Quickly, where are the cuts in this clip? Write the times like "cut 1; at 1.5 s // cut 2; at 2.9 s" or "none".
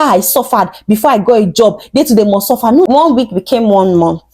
cut 1; at 2.9 s